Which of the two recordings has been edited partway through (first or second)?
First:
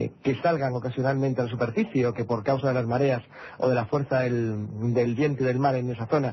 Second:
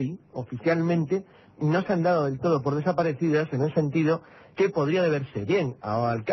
second